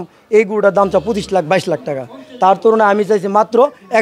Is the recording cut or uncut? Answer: uncut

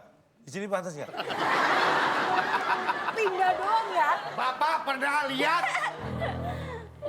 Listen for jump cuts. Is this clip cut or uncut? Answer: cut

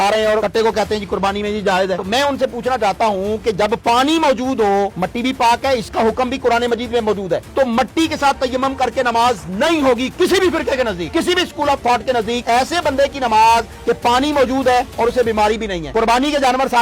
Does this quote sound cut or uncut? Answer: cut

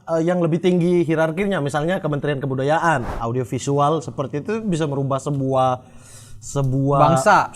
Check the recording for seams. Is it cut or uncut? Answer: cut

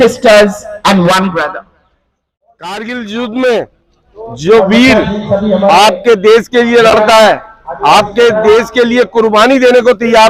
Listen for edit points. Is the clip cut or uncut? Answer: cut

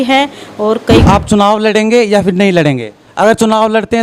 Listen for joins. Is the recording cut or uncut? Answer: cut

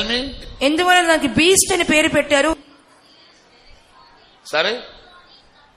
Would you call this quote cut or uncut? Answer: uncut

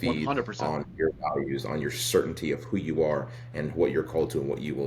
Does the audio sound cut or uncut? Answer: uncut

